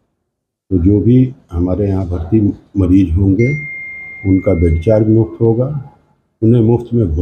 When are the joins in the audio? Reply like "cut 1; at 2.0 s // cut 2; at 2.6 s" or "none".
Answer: none